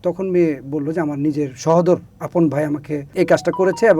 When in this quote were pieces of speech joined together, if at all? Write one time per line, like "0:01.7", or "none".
0:02.2
0:03.1